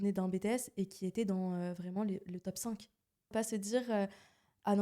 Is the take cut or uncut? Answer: cut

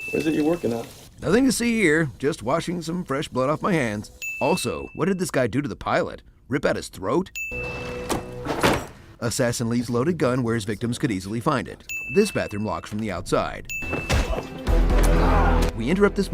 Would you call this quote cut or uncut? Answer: cut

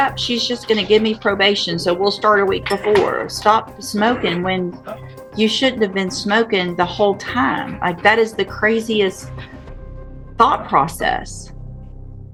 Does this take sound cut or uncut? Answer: uncut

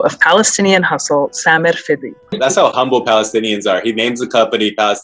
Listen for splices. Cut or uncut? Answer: cut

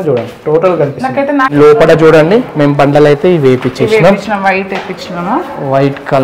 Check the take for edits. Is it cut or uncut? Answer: cut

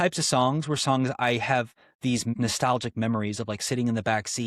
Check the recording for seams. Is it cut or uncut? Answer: cut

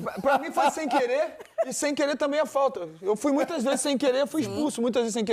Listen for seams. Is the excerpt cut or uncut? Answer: uncut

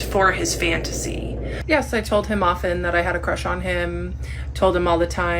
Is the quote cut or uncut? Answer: cut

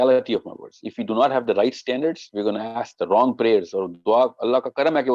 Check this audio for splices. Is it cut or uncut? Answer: uncut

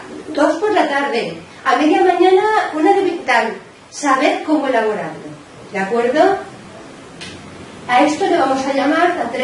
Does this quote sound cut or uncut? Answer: uncut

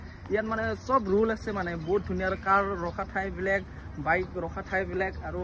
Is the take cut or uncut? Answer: uncut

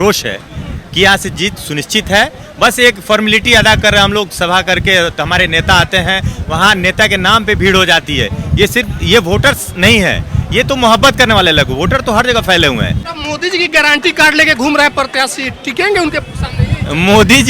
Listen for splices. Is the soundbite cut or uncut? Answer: cut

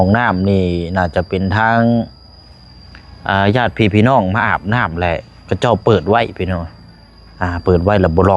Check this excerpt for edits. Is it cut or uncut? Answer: uncut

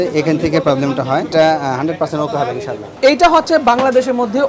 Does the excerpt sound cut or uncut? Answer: cut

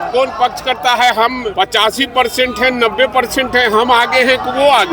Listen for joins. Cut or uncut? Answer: cut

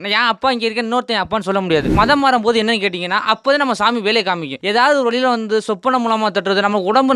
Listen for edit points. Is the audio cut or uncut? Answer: cut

